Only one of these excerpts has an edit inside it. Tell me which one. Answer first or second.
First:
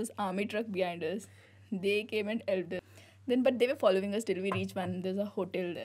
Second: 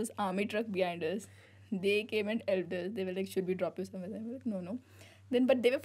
first